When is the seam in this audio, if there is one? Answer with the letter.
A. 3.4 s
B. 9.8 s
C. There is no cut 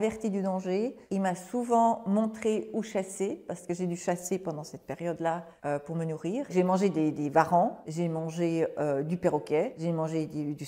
B